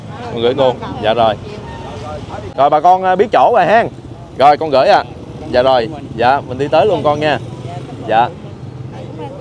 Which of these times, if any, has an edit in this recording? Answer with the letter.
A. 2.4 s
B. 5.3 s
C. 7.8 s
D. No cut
A